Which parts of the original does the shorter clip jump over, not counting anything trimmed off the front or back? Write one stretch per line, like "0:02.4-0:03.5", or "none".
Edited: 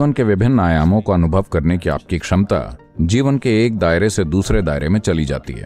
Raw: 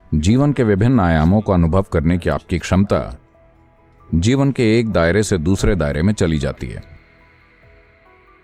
0:03.2-0:03.9